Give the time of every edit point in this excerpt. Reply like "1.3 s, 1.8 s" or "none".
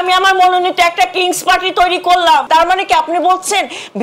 2.4 s

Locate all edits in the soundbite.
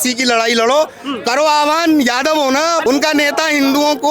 2.8 s

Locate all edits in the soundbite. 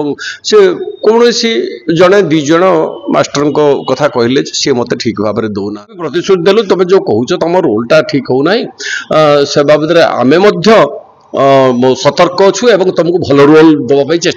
5.9 s

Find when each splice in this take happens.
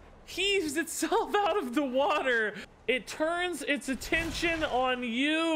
2.7 s

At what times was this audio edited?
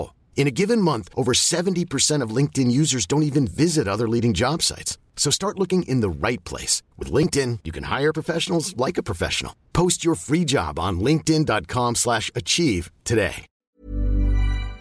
13.5 s

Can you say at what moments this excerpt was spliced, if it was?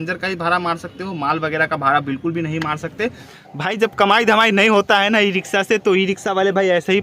3.3 s

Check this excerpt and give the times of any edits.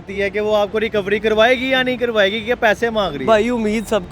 none

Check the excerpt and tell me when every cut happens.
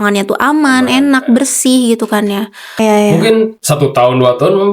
2.8 s

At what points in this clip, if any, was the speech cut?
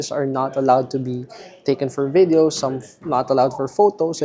none

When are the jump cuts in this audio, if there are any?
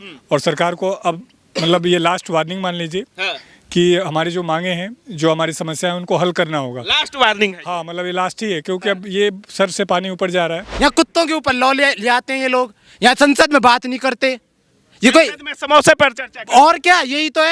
10.6 s

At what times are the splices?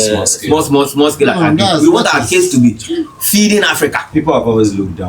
4.1 s

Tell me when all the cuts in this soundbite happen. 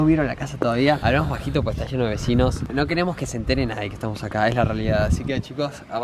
1.0 s

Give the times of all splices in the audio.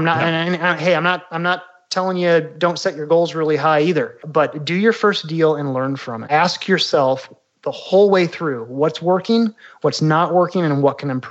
4.2 s, 6.1 s

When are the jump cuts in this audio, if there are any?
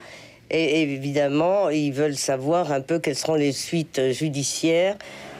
none

